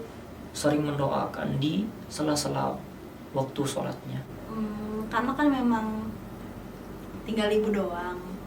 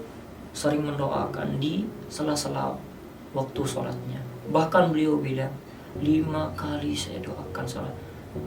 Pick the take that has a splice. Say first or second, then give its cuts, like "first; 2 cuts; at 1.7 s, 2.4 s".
first; 1 cut; at 4.3 s